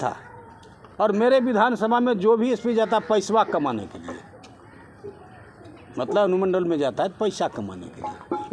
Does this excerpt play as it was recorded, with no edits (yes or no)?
yes